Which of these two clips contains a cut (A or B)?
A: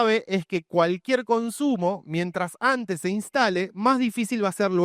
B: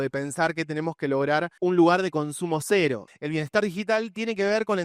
B